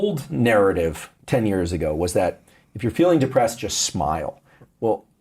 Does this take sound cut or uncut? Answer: cut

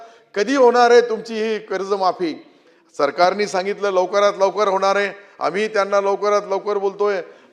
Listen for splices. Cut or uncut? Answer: uncut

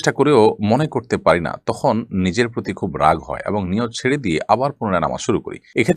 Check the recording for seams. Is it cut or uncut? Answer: uncut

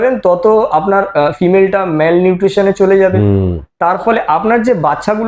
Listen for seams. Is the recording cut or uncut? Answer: uncut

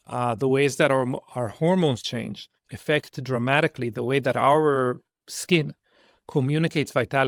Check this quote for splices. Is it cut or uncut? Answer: uncut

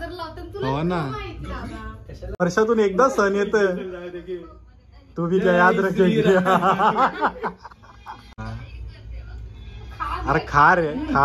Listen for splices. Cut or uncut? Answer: cut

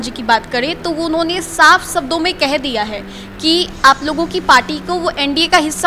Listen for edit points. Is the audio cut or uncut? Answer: uncut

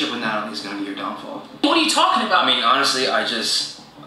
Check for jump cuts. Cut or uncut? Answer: uncut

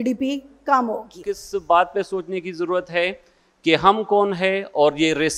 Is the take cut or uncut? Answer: cut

